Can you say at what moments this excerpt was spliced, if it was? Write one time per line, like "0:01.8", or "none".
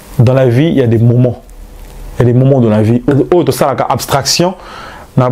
0:03.1